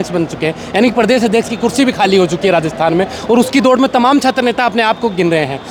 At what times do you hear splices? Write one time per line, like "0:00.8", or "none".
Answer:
none